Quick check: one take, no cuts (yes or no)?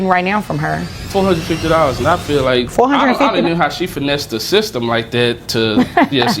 no